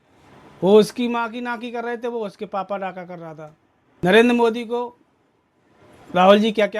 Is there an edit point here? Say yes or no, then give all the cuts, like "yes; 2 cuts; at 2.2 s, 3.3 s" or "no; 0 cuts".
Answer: yes; 1 cut; at 4.0 s